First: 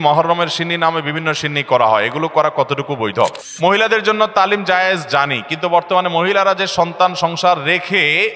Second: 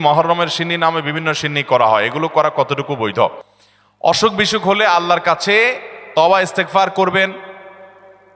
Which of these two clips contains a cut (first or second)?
first